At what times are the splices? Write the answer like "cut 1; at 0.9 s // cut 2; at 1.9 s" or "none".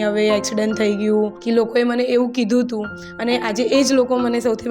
cut 1; at 1.4 s